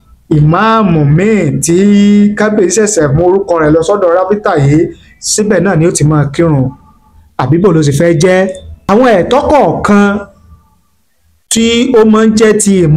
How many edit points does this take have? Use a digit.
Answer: 1